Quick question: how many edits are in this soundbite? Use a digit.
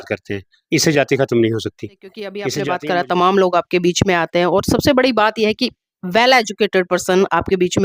1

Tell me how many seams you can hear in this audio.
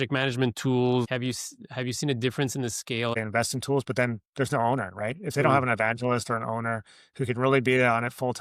2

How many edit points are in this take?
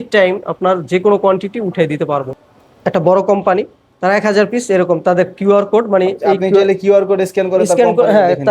1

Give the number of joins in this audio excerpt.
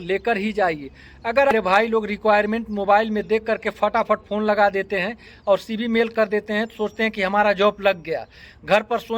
1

